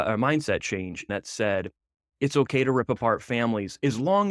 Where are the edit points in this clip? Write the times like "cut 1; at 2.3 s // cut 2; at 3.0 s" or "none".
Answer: cut 1; at 1.1 s